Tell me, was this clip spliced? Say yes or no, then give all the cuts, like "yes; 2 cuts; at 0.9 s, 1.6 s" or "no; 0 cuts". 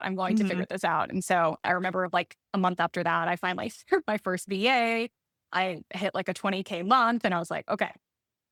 no; 0 cuts